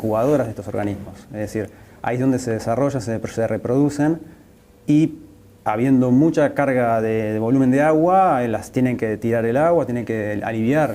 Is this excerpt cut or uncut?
uncut